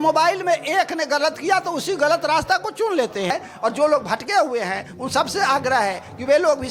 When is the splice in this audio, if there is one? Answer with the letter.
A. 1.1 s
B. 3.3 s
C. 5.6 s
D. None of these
B